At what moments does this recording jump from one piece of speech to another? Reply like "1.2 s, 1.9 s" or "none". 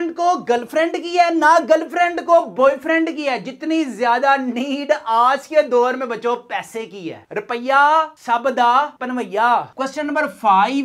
9.7 s